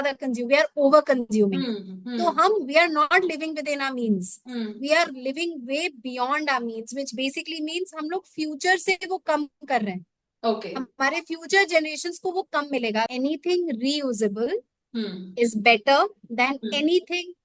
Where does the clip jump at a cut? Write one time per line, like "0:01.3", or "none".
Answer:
0:13.1